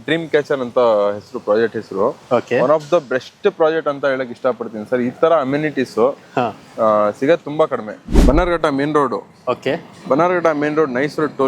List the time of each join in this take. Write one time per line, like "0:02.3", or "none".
0:08.1